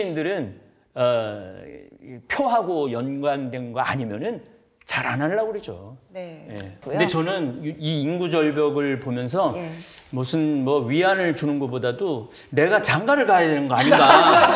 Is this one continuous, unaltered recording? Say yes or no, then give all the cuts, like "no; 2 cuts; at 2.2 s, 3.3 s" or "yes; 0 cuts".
no; 1 cut; at 6.8 s